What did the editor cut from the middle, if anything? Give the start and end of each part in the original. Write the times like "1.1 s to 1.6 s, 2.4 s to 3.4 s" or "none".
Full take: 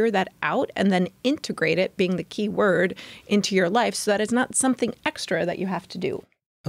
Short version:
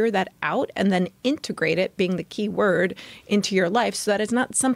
none